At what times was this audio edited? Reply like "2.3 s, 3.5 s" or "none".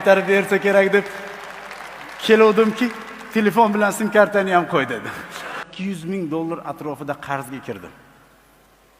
5.6 s